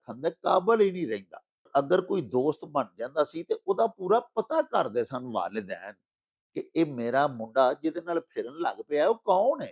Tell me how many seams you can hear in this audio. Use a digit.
1